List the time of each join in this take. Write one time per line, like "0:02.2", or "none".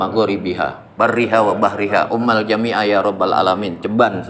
none